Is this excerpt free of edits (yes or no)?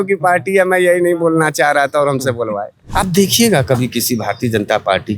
no